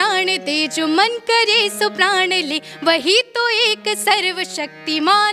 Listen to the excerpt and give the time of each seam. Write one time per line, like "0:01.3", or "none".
none